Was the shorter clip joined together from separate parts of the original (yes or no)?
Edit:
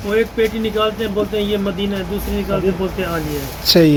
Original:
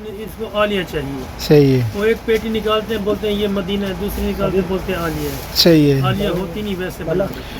no